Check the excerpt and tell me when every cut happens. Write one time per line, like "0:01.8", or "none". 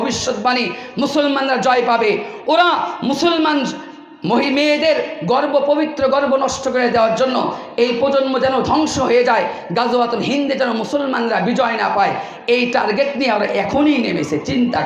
none